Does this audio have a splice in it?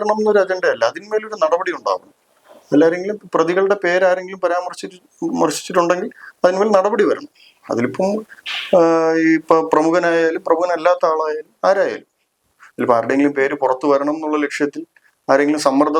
no; 0 cuts

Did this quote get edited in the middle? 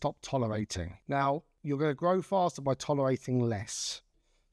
yes; 2 cuts; at 0.9 s, 1.5 s

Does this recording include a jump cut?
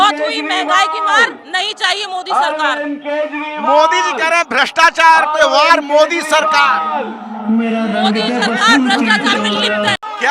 no; 0 cuts

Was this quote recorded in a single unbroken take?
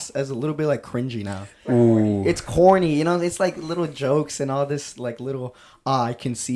yes; 0 cuts

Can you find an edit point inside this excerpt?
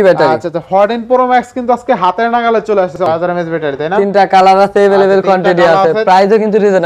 yes; 1 cut; at 3.0 s

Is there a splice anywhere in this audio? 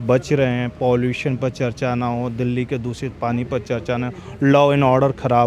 no; 0 cuts

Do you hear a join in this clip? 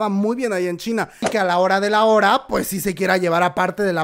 yes; 1 cut; at 1.2 s

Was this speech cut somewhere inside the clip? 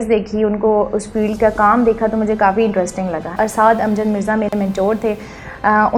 yes; 1 cut; at 3.4 s

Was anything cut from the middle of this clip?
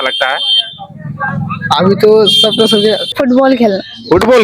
yes; 1 cut; at 3.1 s

